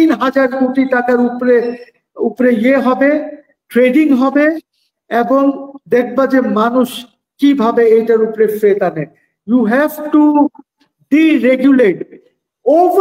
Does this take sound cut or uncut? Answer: uncut